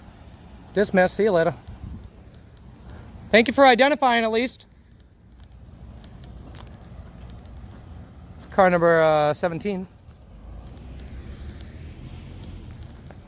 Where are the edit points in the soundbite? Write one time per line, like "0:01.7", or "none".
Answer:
none